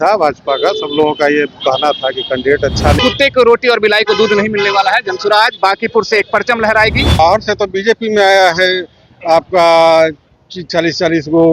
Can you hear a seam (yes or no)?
yes